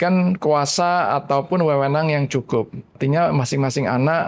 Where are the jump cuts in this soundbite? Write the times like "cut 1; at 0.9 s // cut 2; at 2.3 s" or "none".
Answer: cut 1; at 3.0 s